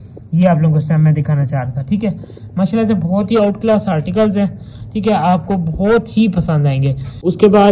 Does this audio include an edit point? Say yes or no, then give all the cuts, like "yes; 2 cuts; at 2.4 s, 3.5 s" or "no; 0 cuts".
no; 0 cuts